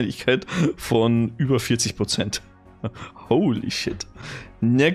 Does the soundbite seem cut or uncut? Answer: uncut